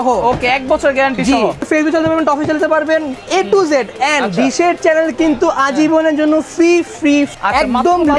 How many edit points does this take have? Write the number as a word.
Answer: two